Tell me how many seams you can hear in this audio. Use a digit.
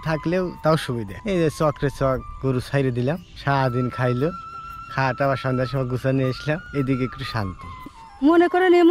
4